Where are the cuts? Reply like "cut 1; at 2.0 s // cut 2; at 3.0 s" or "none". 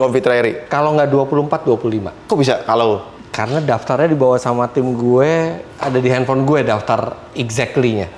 cut 1; at 2.1 s

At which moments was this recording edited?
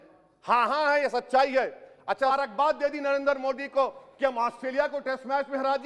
cut 1; at 2.3 s

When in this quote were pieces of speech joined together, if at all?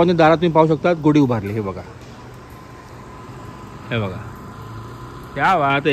none

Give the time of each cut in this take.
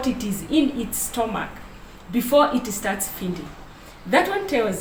none

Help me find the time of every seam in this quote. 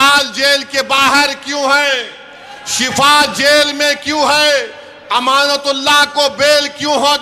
none

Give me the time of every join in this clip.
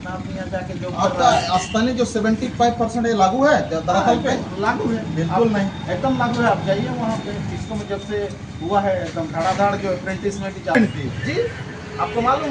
cut 1; at 10.7 s

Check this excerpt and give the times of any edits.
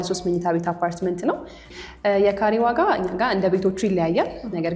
cut 1; at 1.7 s

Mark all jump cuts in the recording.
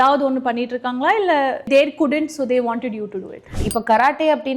cut 1; at 1.7 s // cut 2; at 3.6 s

